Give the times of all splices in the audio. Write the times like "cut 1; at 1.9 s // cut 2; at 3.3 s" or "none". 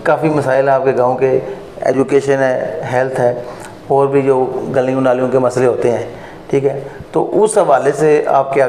none